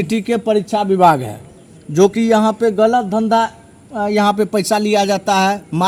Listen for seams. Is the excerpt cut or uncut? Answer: uncut